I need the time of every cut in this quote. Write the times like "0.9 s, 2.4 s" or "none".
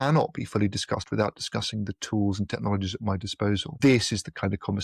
3.7 s